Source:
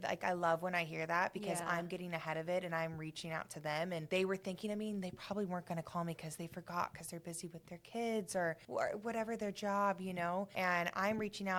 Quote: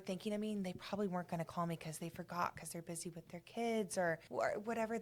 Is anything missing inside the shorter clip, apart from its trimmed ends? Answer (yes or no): no